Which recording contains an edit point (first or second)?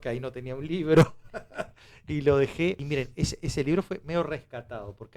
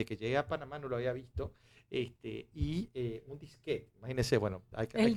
first